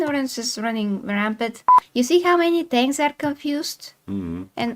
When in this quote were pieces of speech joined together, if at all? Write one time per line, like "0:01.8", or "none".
0:01.8